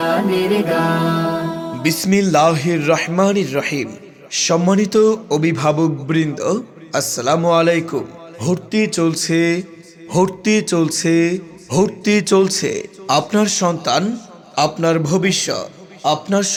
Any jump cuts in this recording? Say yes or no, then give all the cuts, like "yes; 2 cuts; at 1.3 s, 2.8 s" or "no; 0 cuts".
no; 0 cuts